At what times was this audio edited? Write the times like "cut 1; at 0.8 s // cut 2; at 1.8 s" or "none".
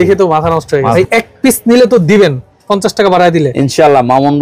cut 1; at 0.9 s